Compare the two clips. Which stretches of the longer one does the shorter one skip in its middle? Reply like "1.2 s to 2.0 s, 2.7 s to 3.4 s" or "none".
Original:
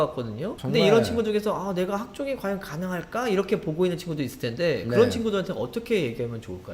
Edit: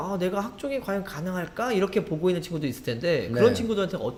none